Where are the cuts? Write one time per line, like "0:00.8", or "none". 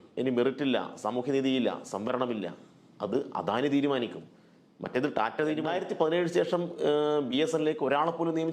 0:05.7